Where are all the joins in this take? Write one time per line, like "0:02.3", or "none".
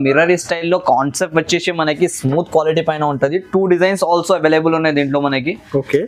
none